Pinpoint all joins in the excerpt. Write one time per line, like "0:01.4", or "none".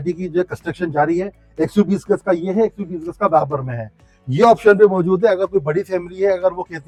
none